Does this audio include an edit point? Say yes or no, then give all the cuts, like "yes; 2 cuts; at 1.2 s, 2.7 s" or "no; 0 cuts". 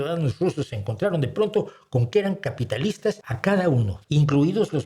yes; 2 cuts; at 3.3 s, 4.0 s